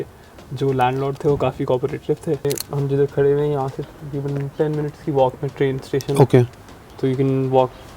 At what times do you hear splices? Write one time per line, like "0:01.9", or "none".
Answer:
0:02.4